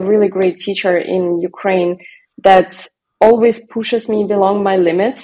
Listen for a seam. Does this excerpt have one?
no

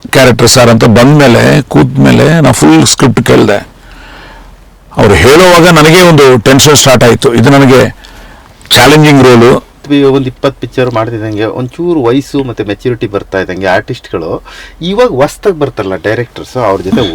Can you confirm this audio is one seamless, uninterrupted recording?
no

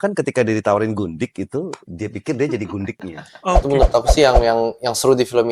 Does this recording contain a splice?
yes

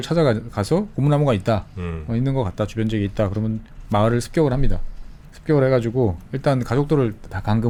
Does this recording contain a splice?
no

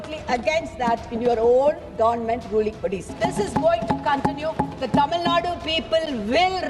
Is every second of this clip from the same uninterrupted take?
no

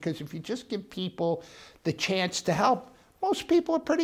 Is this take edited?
no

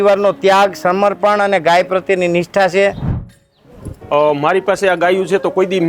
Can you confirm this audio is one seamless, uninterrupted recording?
no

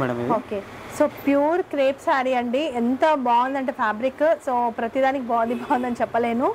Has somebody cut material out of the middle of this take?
no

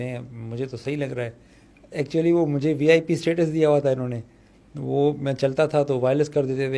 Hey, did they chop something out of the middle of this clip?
no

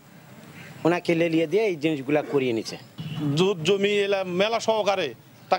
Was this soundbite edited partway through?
yes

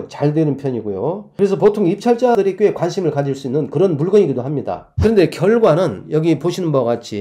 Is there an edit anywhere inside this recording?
yes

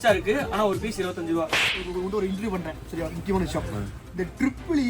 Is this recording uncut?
no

